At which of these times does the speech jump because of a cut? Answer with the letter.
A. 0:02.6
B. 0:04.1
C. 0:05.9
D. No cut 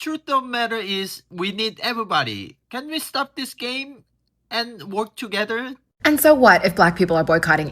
C